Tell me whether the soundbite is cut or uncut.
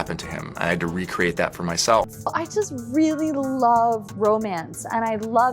cut